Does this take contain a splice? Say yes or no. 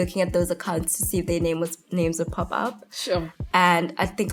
no